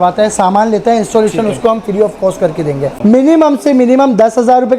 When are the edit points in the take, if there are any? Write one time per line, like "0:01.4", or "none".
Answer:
0:02.9